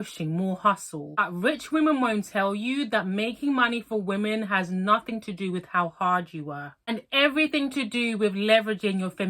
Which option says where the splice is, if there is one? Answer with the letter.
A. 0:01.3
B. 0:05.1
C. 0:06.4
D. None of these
A